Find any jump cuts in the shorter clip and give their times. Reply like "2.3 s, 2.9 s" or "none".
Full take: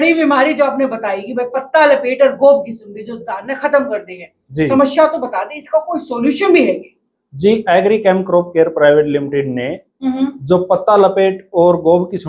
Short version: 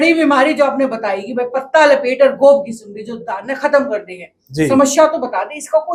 none